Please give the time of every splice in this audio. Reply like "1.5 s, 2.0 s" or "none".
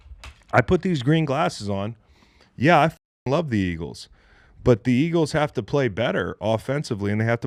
none